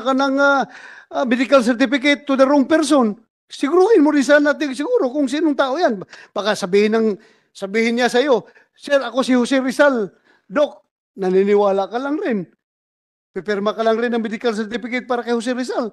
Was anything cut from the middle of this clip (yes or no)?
no